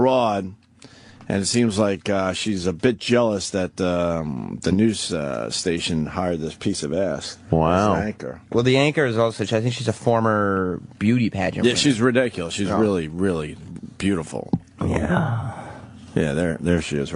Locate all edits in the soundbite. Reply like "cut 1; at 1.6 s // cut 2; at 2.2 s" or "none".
cut 1; at 2.7 s